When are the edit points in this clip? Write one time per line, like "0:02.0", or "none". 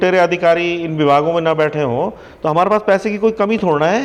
none